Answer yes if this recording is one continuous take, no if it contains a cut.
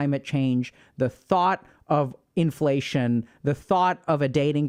yes